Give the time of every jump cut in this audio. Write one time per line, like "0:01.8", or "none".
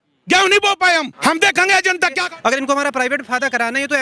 0:01.1
0:02.2

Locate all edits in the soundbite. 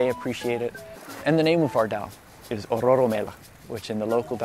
0:01.2

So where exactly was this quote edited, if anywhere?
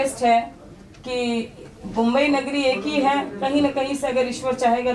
none

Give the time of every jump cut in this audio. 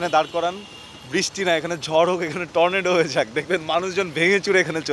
none

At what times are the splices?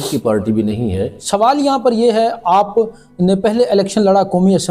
0:01.2

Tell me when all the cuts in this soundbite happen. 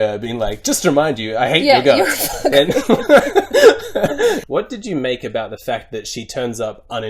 0:04.4

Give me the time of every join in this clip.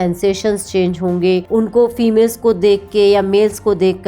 0:01.4

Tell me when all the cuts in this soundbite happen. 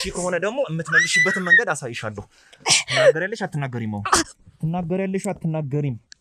none

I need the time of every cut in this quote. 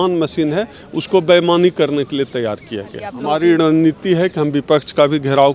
0:03.1

